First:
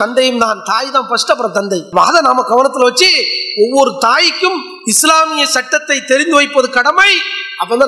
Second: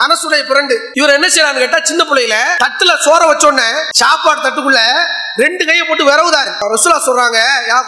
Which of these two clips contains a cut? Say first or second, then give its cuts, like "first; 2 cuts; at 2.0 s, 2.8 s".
second; 4 cuts; at 0.9 s, 2.5 s, 3.9 s, 6.6 s